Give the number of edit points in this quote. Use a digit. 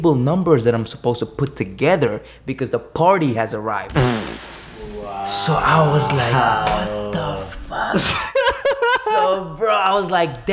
0